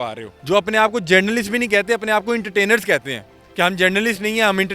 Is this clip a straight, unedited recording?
yes; 0 cuts

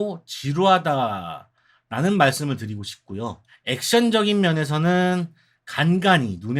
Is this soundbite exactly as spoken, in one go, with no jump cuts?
yes; 0 cuts

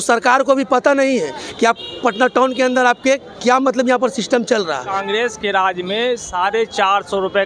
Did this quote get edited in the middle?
yes; 1 cut; at 4.9 s

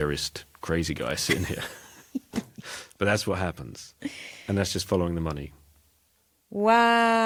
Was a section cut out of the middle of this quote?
no; 0 cuts

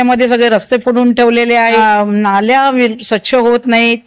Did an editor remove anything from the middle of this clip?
yes; 1 cut; at 1.8 s

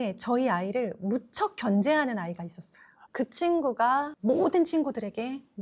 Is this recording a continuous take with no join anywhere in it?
no; 1 cut; at 3.0 s

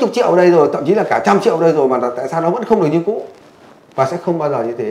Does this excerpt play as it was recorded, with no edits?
yes; 0 cuts

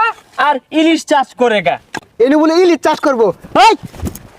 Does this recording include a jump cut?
yes; 1 cut; at 2.0 s

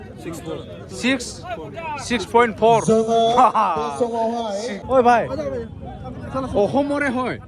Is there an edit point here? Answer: yes; 1 cut; at 4.8 s

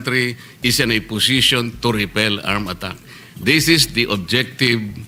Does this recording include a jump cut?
no; 0 cuts

